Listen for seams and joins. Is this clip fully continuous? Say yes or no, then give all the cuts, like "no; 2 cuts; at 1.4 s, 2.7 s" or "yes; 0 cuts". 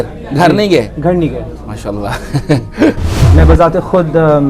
no; 1 cut; at 3.1 s